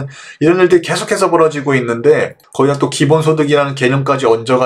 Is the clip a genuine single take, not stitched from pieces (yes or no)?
no